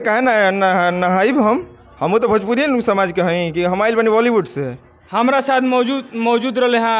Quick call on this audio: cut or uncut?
uncut